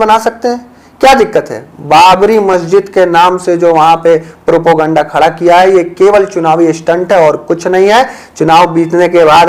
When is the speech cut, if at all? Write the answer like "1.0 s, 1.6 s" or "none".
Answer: none